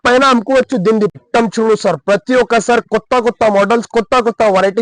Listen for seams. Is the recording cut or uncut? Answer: cut